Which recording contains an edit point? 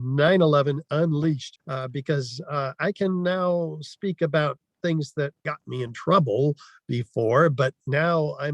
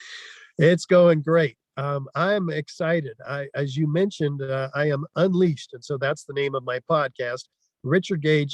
first; 2 cuts; at 1.5 s, 5.5 s

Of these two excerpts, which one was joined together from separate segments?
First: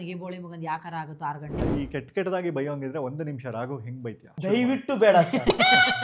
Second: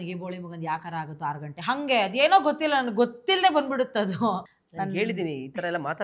first; 2 cuts; at 1.6 s, 4.3 s

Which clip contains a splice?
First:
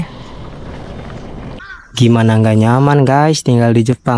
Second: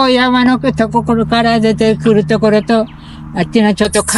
first; 1 cut; at 1.6 s

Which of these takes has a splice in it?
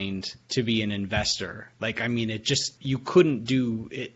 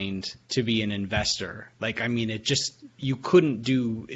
first; 1 cut; at 2.7 s

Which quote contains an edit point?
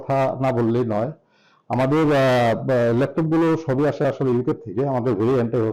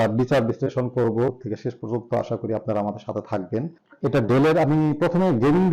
second; 2 cuts; at 1.3 s, 3.8 s

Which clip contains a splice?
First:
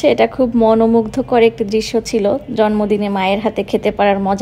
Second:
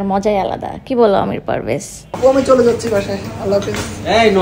second; 1 cut; at 2.0 s

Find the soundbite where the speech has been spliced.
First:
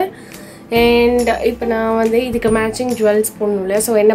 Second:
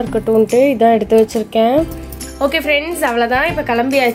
second; 1 cut; at 2.3 s

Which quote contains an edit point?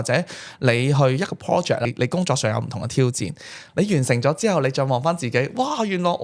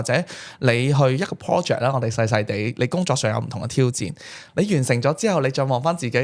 first; 1 cut; at 1.9 s

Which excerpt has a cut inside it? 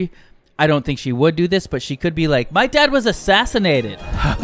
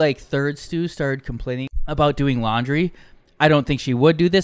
second; 1 cut; at 1.8 s

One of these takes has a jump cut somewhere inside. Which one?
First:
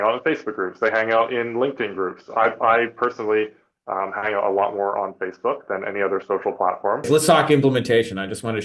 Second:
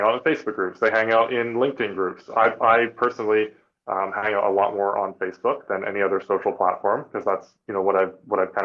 first; 1 cut; at 7.1 s

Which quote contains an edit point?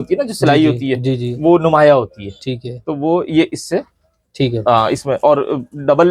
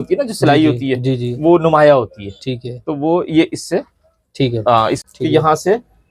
second; 1 cut; at 5.0 s

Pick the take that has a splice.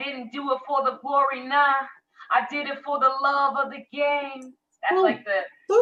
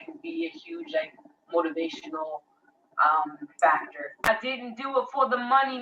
second; 1 cut; at 4.1 s

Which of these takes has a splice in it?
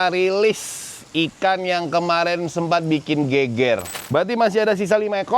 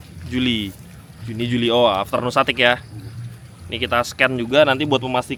first; 1 cut; at 3.9 s

